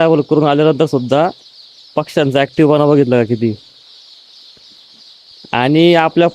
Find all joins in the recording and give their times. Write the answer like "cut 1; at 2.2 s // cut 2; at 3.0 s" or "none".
none